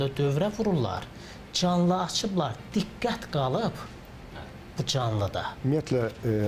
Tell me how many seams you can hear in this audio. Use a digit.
1